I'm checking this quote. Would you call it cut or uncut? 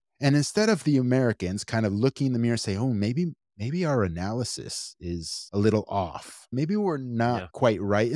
cut